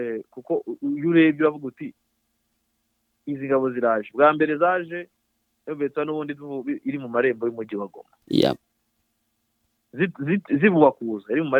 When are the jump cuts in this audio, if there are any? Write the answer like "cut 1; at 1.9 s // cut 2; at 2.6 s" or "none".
none